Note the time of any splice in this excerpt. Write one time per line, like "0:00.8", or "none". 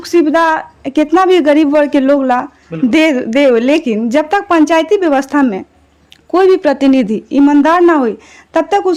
none